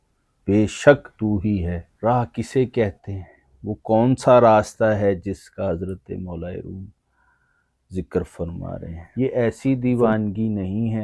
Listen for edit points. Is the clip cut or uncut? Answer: cut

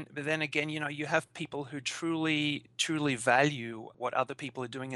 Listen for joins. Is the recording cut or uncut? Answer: cut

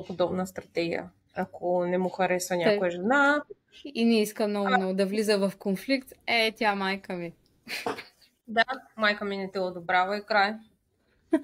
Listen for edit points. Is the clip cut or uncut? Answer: uncut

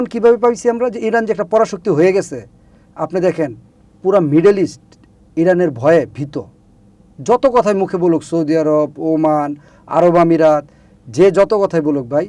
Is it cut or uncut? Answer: uncut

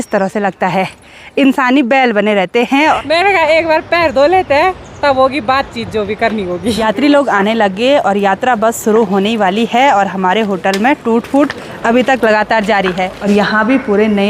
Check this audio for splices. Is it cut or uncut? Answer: cut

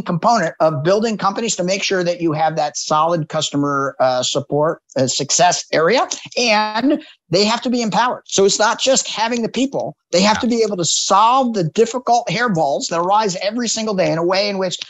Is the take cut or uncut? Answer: uncut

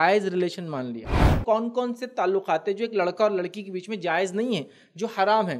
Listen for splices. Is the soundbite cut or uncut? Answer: cut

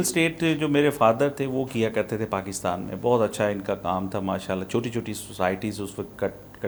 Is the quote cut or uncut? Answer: uncut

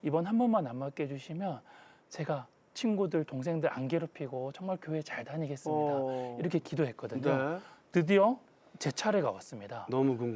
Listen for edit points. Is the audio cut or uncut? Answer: uncut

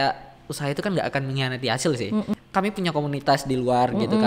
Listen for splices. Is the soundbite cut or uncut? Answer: cut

